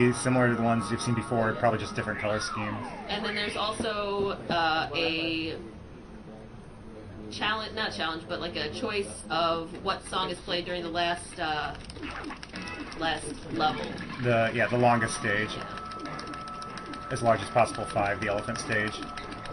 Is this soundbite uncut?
no; 1 cut; at 8.4 s

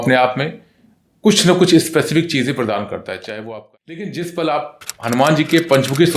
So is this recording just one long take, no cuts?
no; 1 cut; at 3.4 s

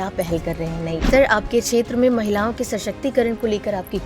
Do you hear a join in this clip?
yes; 1 cut; at 1.0 s

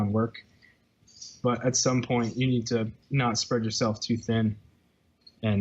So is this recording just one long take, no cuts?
no; 1 cut; at 3.0 s

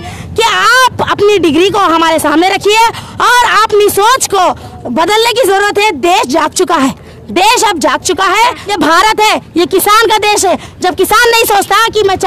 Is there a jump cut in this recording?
yes; 1 cut; at 8.7 s

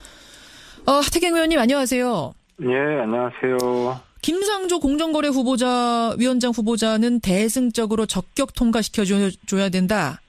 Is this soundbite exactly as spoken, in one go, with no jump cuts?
no; 1 cut; at 4.7 s

